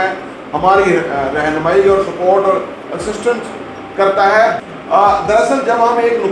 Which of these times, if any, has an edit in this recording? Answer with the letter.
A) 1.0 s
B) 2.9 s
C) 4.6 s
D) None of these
C